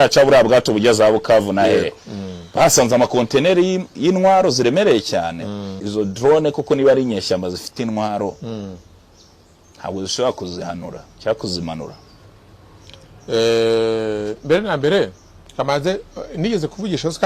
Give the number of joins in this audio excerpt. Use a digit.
1